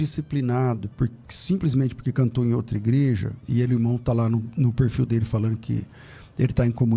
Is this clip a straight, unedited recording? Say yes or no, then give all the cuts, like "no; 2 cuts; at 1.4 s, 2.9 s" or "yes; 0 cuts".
yes; 0 cuts